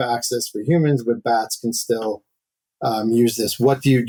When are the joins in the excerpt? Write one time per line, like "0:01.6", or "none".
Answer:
none